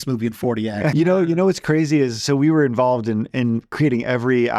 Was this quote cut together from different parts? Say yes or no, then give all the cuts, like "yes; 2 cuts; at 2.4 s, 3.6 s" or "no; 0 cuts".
yes; 1 cut; at 0.9 s